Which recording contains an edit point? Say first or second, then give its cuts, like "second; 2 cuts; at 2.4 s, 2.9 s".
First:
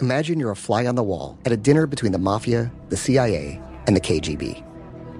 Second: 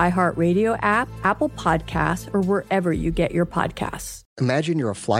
second; 1 cut; at 1.1 s